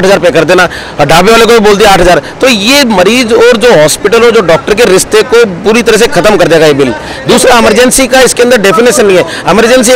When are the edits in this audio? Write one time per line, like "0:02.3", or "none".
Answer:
none